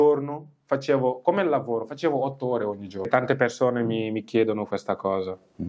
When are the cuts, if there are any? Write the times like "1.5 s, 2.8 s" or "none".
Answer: 3.1 s